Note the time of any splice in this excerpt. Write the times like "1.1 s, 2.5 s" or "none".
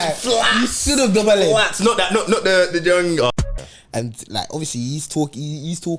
3.3 s